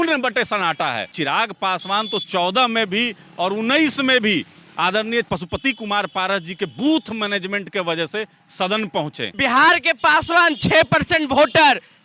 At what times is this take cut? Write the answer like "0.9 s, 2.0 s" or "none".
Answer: 1.1 s, 5.3 s, 9.3 s